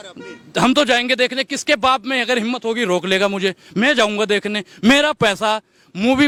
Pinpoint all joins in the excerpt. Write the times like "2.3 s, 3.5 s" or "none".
none